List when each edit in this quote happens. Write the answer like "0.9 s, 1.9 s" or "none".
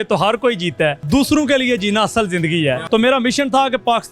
1.0 s, 2.8 s